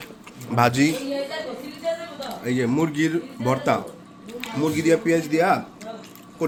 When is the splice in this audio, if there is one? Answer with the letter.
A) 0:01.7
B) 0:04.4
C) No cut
C